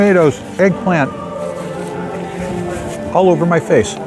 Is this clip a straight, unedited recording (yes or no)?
yes